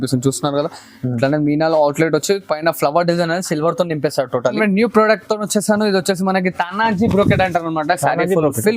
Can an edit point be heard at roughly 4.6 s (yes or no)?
yes